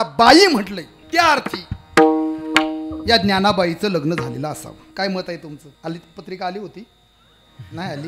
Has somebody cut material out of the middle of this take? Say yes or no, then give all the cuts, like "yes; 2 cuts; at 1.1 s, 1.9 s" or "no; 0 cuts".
yes; 3 cuts; at 0.9 s, 4.8 s, 5.7 s